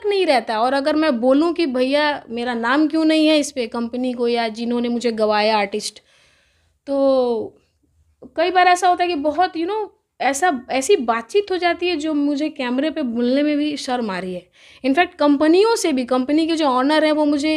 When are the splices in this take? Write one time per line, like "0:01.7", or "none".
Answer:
none